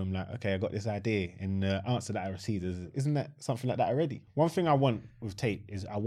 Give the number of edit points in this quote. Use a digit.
2